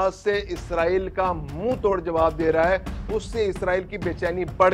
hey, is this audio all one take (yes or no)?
yes